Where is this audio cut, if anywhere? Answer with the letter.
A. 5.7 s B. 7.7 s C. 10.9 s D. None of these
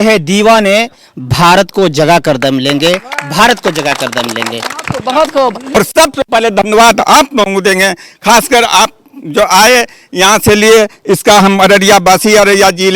A